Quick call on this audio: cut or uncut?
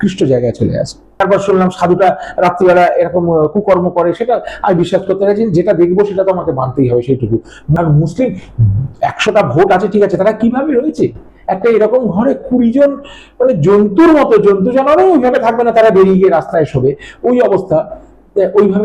cut